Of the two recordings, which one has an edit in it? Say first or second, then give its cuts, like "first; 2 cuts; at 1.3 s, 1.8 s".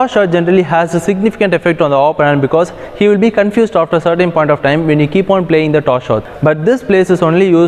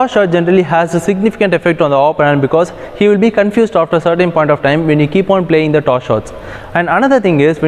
first; 1 cut; at 6.3 s